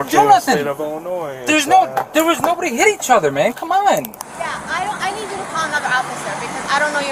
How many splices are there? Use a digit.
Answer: 1